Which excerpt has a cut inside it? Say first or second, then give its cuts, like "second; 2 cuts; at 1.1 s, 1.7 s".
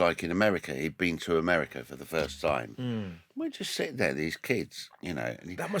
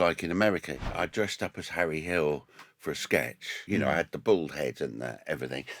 second; 2 cuts; at 0.9 s, 3.6 s